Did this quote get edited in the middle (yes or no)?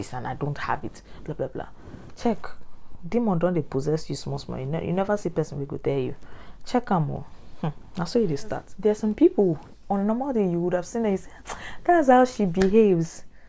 no